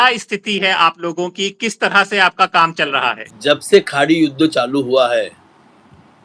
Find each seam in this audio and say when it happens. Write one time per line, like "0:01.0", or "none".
0:03.3

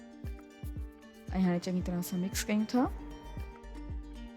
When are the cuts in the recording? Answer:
0:01.3
0:03.3

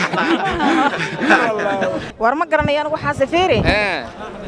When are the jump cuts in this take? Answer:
0:02.0

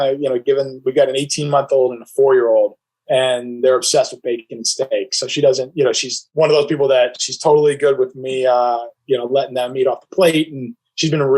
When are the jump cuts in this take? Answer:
0:06.2

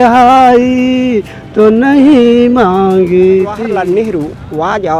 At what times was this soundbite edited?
0:03.6

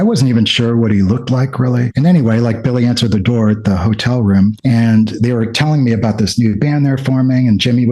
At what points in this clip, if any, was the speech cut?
0:01.9

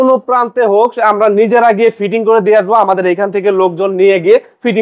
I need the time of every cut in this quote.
none

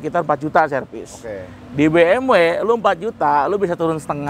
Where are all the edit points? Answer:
none

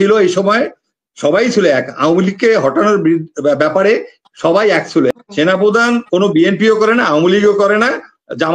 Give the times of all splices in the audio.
0:05.1

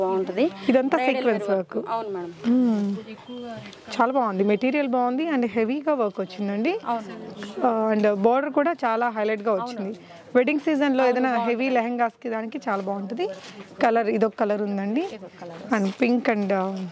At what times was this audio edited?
none

